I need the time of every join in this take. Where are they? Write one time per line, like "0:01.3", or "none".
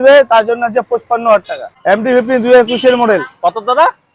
0:01.7